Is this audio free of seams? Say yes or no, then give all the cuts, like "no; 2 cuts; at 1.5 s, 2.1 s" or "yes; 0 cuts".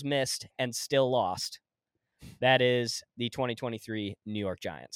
yes; 0 cuts